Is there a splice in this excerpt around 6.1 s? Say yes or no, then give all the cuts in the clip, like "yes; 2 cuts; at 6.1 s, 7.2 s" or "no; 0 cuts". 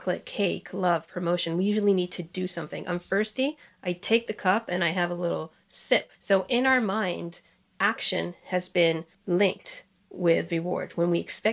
yes; 2 cuts; at 6.1 s, 9.1 s